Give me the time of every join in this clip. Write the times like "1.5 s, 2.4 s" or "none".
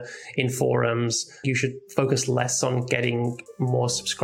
1.4 s